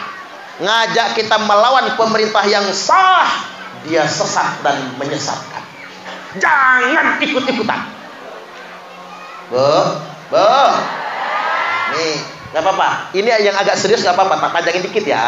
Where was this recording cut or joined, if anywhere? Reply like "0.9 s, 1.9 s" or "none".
none